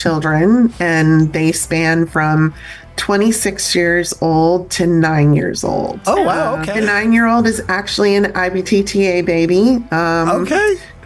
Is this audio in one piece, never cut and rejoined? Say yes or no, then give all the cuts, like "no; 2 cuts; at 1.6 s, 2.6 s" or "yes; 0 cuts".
no; 1 cut; at 6.6 s